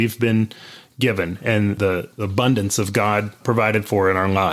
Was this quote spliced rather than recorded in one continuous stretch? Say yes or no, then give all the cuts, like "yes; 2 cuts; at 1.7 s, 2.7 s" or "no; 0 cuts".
yes; 2 cuts; at 1.8 s, 3.4 s